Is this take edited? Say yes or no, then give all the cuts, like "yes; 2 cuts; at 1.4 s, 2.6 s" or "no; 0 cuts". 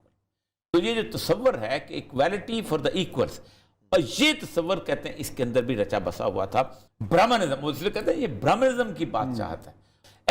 yes; 1 cut; at 6.8 s